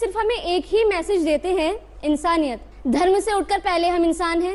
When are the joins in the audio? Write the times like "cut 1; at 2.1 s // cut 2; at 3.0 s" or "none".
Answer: cut 1; at 2.7 s